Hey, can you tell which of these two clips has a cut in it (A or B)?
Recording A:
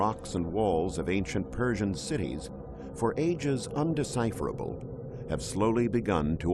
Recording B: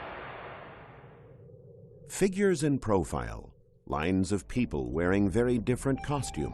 B